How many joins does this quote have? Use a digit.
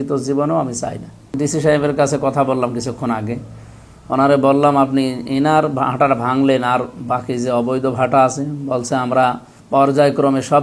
2